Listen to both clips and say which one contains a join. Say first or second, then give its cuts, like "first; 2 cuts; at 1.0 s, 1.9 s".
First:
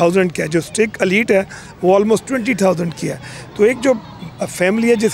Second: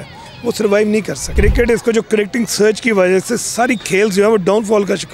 second; 1 cut; at 1.2 s